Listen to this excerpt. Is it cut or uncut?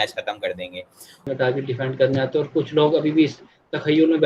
cut